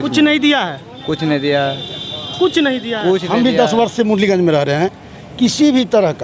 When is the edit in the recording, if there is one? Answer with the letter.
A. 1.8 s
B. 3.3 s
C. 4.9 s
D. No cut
B